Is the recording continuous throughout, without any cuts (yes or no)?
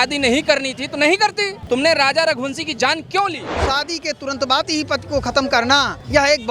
no